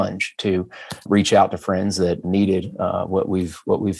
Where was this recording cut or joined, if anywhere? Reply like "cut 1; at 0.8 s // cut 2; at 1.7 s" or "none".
cut 1; at 1.0 s // cut 2; at 2.2 s